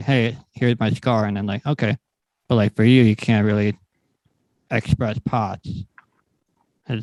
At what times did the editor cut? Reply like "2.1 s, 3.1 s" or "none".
none